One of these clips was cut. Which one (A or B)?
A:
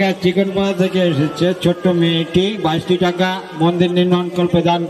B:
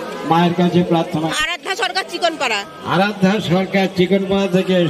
B